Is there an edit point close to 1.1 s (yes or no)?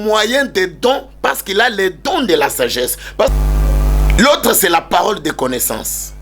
no